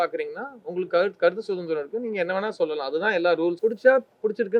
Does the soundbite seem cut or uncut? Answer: cut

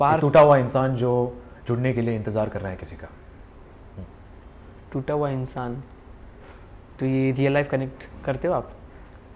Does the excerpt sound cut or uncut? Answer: uncut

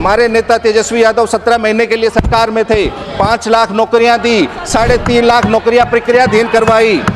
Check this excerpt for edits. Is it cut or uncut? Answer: uncut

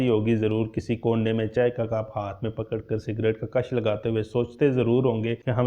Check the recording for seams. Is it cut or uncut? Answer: uncut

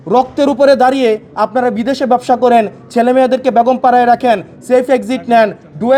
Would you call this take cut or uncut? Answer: uncut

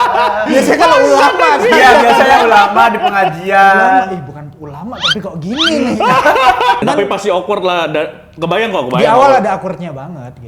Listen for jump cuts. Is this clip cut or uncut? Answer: cut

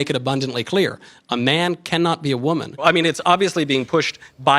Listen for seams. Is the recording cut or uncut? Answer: cut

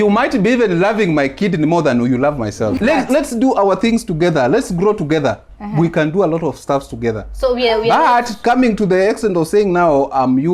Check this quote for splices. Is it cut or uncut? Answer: cut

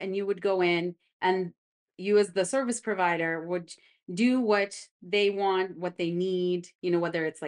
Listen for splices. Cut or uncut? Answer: cut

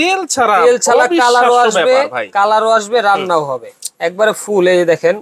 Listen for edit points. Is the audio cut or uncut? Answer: uncut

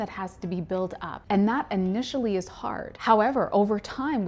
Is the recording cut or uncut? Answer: cut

